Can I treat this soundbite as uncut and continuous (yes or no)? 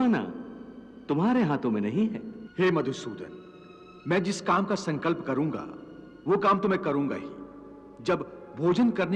no